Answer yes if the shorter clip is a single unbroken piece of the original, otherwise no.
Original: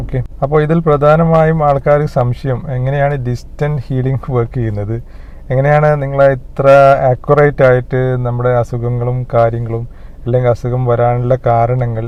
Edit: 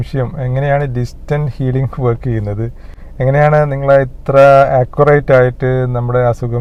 yes